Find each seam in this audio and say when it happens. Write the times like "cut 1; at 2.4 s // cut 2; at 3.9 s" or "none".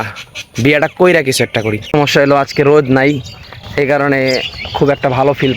cut 1; at 1.9 s